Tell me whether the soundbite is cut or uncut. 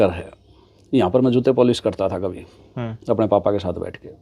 uncut